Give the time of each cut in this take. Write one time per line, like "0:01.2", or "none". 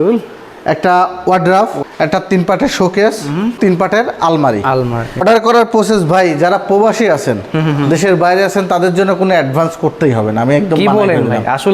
0:01.8
0:03.6
0:05.2